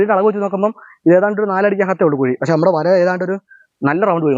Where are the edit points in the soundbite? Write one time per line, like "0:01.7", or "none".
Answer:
none